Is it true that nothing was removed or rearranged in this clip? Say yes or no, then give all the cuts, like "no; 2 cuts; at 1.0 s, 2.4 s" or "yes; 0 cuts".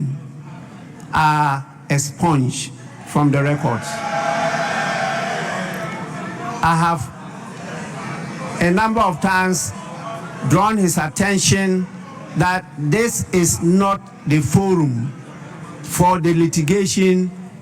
yes; 0 cuts